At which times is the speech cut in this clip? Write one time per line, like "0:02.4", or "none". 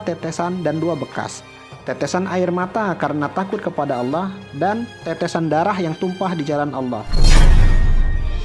0:07.2